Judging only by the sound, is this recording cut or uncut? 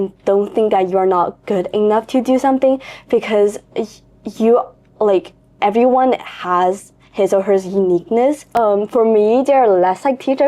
cut